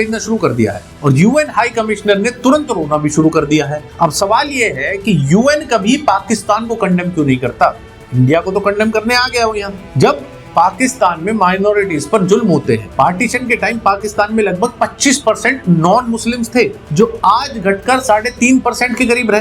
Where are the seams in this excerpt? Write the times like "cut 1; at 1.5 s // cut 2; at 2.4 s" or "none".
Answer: none